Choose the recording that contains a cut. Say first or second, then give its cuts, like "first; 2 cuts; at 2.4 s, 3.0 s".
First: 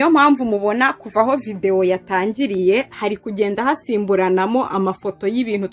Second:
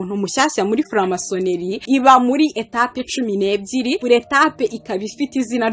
second; 2 cuts; at 1.3 s, 4.0 s